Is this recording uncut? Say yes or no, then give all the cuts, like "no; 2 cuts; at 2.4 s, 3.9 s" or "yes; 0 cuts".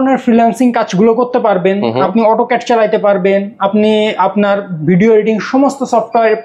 yes; 0 cuts